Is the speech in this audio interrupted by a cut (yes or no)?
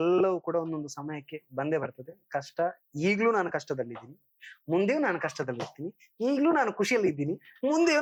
no